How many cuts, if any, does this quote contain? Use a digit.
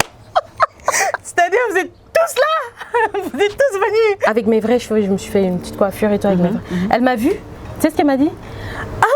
1